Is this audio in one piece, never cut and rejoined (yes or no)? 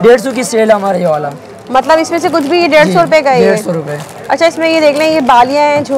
yes